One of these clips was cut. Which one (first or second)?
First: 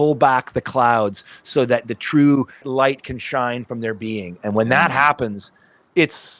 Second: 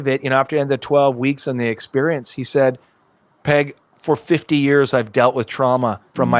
first